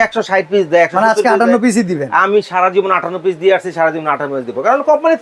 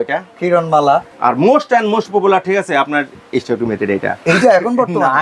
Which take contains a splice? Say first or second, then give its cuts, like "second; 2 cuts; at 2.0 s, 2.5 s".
second; 2 cuts; at 1.1 s, 3.1 s